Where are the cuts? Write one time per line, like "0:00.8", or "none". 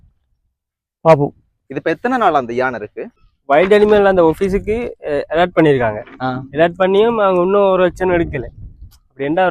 0:03.1